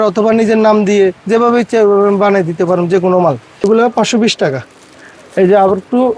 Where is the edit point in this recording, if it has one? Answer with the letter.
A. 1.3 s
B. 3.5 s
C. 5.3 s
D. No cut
B